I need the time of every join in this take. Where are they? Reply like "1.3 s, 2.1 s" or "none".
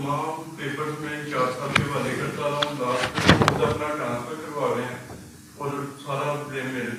none